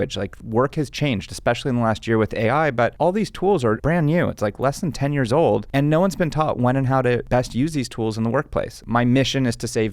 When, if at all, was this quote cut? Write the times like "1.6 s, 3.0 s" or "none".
3.8 s, 7.3 s, 8.8 s